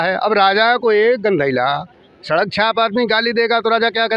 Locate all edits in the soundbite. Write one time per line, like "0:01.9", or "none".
none

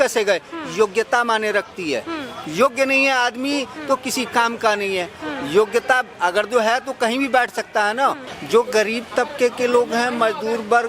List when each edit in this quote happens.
0:08.3

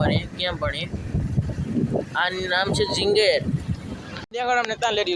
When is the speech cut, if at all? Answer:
0:04.2

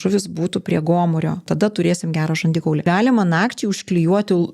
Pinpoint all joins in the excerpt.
0:01.4
0:02.8

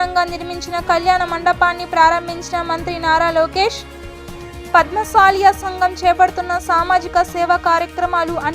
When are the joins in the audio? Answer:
none

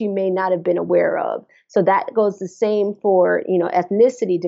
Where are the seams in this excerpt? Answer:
none

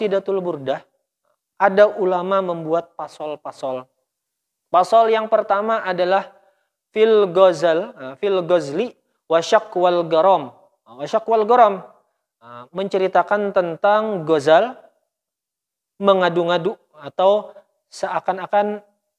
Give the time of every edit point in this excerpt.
none

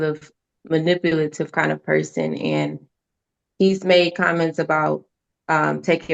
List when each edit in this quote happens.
none

